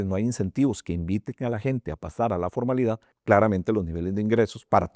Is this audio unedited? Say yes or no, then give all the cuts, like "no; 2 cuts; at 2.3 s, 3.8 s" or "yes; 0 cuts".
no; 1 cut; at 3.1 s